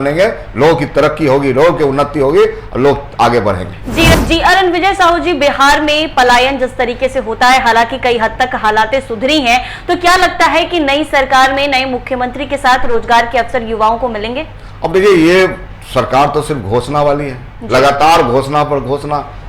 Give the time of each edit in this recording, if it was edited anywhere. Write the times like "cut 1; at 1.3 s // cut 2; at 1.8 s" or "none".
cut 1; at 4.1 s